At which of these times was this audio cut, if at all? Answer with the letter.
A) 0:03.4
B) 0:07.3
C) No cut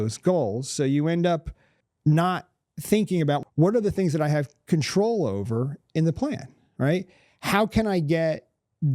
A